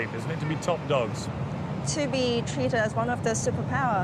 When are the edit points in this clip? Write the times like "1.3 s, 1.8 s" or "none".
none